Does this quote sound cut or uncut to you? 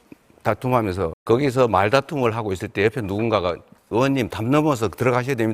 cut